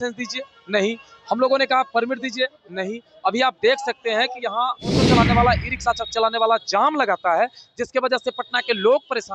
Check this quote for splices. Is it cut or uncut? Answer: cut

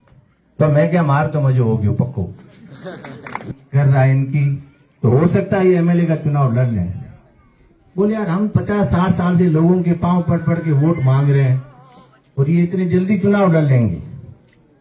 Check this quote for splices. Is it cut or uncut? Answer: cut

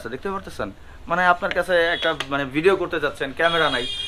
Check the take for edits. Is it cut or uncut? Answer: uncut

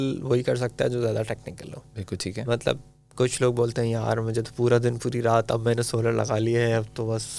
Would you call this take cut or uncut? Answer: uncut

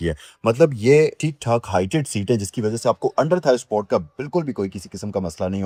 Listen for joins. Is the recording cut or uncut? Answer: uncut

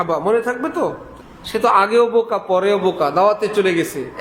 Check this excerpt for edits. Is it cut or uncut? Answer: uncut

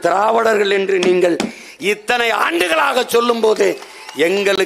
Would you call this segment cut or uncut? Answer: uncut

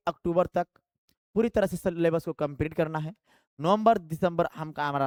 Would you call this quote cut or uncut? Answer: uncut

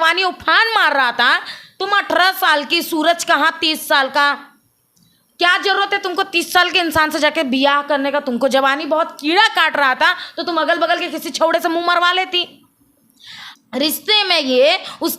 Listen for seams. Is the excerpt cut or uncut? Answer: uncut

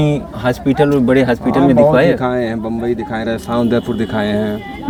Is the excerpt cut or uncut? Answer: uncut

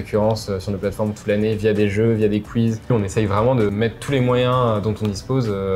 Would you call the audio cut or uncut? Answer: cut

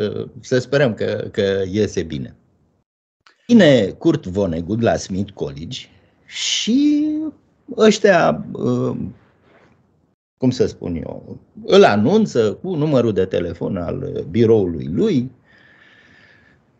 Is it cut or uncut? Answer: cut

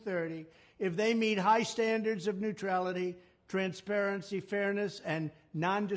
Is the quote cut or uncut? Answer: uncut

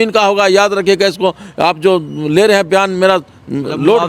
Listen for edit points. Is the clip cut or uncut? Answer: uncut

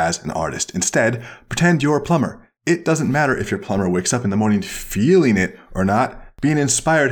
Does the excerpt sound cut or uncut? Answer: cut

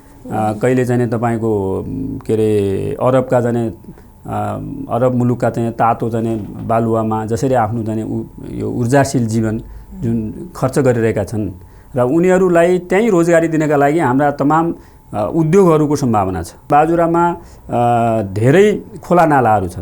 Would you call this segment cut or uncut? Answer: cut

